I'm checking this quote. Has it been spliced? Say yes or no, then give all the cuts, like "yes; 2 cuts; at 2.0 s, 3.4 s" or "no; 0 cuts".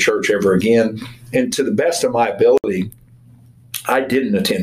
yes; 1 cut; at 2.6 s